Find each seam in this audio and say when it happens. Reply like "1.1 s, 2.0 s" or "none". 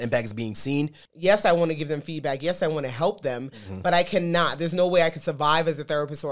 1.0 s